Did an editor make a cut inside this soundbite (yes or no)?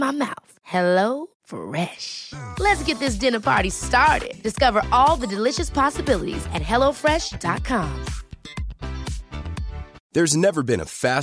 yes